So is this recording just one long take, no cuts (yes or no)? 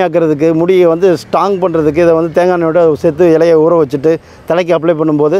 yes